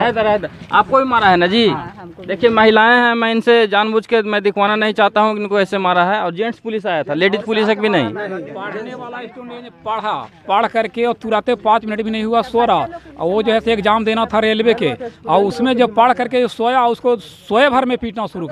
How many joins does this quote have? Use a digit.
0